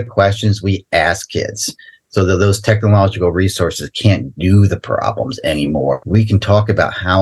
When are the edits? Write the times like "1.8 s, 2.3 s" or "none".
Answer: 6.0 s